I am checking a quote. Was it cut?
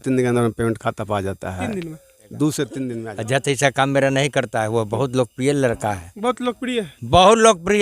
yes; 1 cut; at 3.0 s

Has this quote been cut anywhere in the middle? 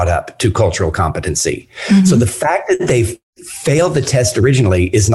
no; 0 cuts

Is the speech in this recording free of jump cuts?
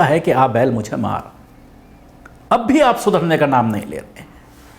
yes; 0 cuts

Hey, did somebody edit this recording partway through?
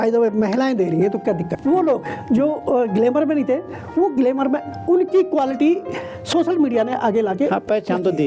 yes; 1 cut; at 1.6 s

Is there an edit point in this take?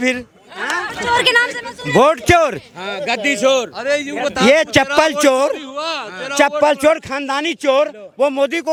no; 0 cuts

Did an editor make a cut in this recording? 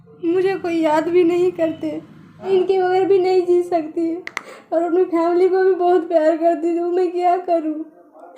yes; 1 cut; at 2.5 s

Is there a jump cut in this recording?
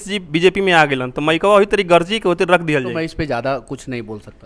yes; 1 cut; at 2.9 s

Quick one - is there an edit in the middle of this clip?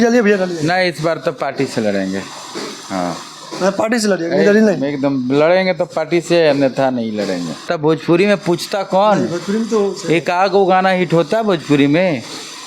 yes; 1 cut; at 7.7 s

